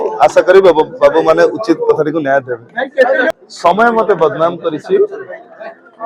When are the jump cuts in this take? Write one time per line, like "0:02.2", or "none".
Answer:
0:03.3